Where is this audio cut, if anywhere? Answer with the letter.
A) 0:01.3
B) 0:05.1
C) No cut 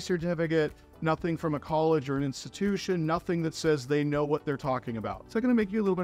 B